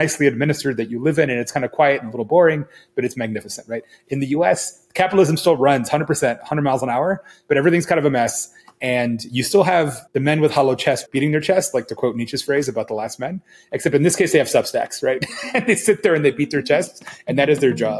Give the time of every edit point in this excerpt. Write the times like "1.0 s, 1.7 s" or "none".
10.0 s, 11.0 s